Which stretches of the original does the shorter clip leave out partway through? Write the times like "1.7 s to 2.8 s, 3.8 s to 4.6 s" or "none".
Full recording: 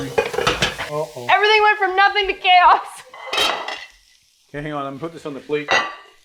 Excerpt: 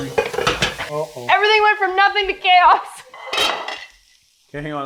none